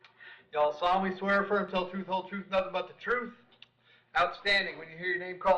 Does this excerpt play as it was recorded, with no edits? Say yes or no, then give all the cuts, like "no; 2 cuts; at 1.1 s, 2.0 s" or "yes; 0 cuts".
no; 2 cuts; at 1.0 s, 2.3 s